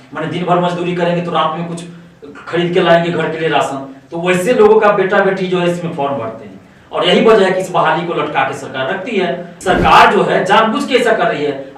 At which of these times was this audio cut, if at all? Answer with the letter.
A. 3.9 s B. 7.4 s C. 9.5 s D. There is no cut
C